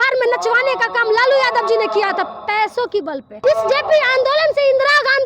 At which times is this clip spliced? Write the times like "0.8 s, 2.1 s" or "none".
3.4 s